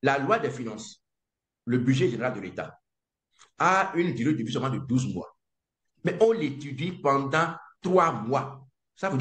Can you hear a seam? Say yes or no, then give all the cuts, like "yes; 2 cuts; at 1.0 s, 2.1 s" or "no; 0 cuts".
no; 0 cuts